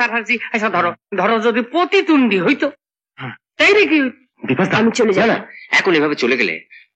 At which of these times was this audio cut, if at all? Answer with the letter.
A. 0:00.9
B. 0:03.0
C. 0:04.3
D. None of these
C